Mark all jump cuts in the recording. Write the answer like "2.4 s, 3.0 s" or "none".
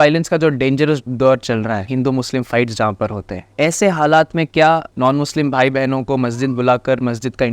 1.8 s, 4.9 s